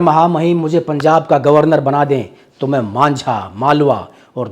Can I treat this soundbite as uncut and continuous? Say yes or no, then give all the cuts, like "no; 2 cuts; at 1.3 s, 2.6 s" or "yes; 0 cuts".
yes; 0 cuts